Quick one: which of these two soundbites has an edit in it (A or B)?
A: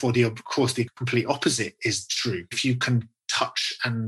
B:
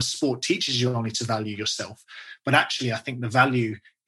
A